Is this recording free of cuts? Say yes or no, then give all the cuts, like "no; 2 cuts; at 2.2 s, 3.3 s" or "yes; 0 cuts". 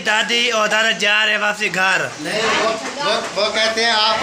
yes; 0 cuts